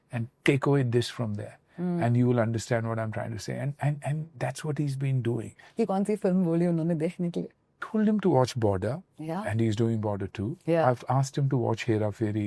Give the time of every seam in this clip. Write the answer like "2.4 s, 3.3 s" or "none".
5.7 s, 7.8 s

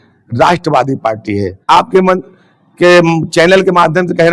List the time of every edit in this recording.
1.6 s

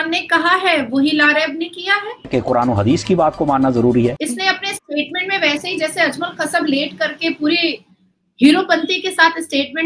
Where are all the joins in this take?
2.3 s, 4.2 s

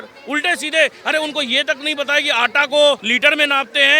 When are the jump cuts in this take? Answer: 3.1 s

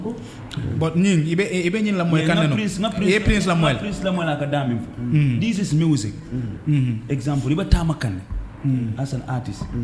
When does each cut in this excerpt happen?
none

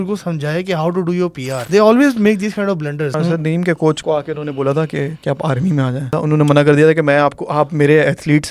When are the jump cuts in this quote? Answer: 1.6 s, 3.2 s, 4.0 s, 5.2 s, 6.2 s

